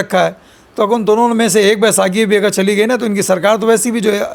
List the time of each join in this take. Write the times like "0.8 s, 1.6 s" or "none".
none